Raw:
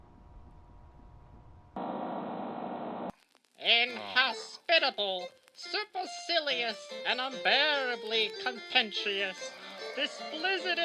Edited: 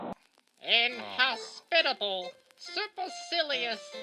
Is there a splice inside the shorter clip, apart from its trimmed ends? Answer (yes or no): no